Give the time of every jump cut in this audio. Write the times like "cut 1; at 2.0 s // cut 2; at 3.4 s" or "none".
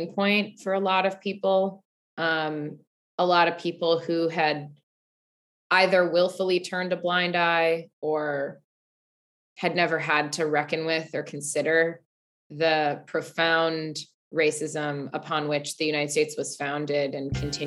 none

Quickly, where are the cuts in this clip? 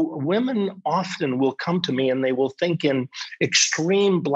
none

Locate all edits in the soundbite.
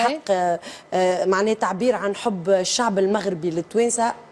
none

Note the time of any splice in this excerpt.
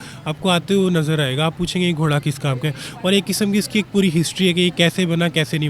none

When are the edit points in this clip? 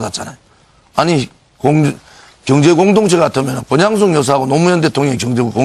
cut 1; at 4.5 s

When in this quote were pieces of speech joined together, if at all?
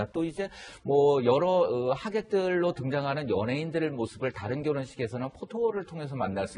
cut 1; at 2.7 s

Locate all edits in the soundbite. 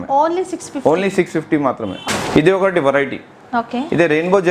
cut 1; at 2.0 s

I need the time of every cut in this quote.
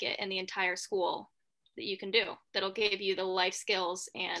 none

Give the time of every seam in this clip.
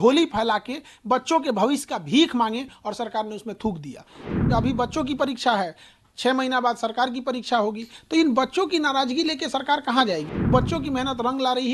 cut 1; at 4.3 s // cut 2; at 10.5 s

